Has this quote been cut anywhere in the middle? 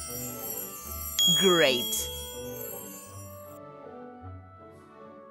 yes; 3 cuts; at 1.1 s, 1.9 s, 4.1 s

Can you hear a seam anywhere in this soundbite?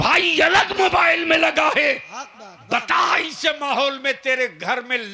no; 0 cuts

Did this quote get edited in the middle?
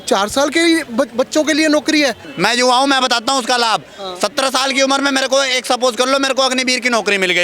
yes; 1 cut; at 2.2 s

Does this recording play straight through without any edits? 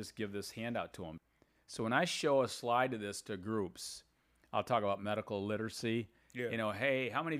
no; 1 cut; at 1.2 s

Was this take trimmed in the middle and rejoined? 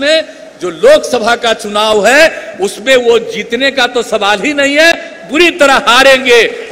no; 0 cuts

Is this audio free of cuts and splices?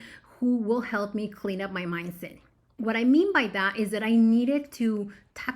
no; 1 cut; at 2.7 s

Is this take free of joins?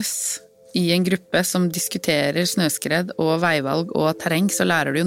yes; 0 cuts

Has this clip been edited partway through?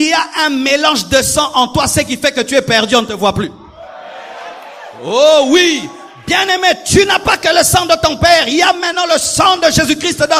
no; 0 cuts

